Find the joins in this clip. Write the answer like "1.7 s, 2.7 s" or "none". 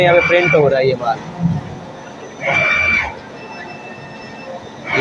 none